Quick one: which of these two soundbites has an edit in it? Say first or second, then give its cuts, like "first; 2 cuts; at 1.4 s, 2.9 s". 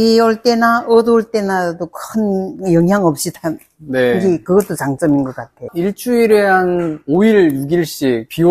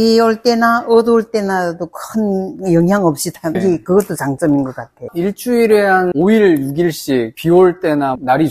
second; 2 cuts; at 3.6 s, 6.1 s